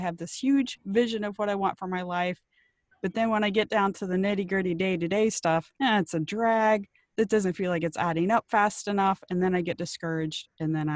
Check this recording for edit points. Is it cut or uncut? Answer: uncut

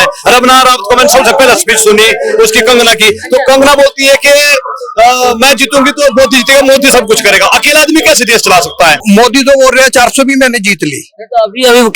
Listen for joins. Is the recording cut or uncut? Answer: cut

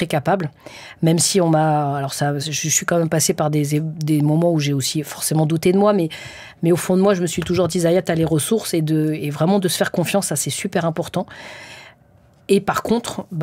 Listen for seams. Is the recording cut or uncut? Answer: uncut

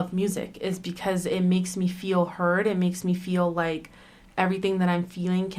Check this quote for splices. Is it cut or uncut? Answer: uncut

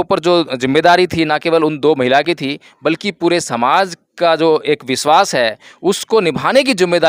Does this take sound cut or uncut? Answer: uncut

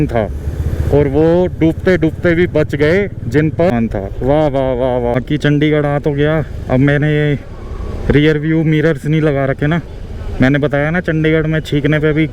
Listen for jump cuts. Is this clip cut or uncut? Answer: cut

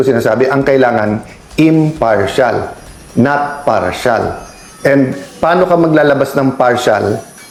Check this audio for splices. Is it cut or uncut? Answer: uncut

